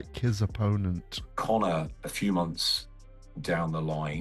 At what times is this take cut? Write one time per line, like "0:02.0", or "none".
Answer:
0:01.2